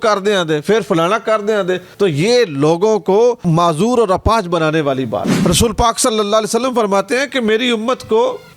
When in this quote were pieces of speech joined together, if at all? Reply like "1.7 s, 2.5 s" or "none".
5.3 s